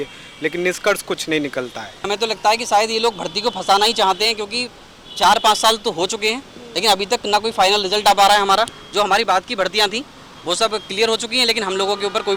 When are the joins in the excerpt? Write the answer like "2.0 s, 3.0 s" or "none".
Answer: 2.0 s